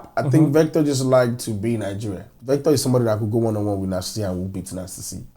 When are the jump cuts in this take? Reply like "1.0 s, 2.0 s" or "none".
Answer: 2.3 s

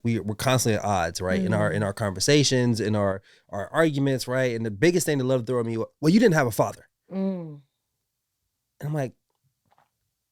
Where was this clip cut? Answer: none

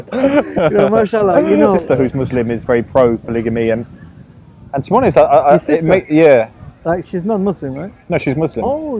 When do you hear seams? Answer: 1.8 s

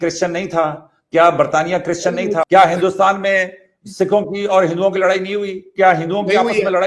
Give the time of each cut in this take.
2.5 s

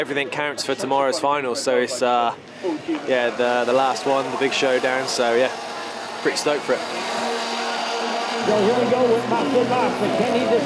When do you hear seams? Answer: none

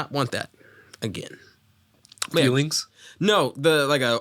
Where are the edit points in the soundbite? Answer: none

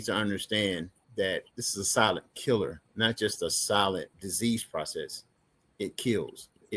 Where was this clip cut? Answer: 1.6 s, 2.8 s, 4.2 s

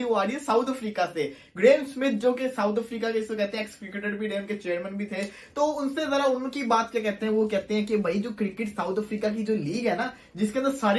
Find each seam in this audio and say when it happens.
none

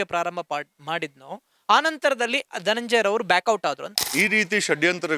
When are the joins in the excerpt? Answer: 4.0 s

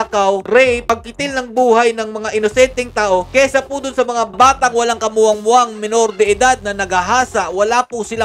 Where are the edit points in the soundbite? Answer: none

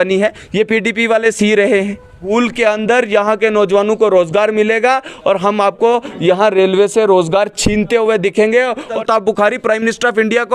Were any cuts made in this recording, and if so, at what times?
2.3 s, 8.9 s

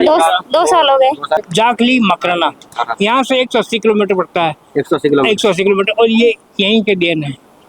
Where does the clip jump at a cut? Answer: 1.4 s, 2.7 s

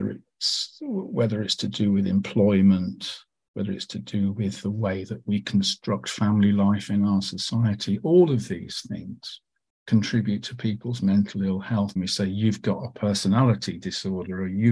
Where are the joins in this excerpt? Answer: 11.9 s

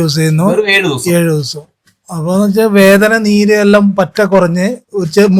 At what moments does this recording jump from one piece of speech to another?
none

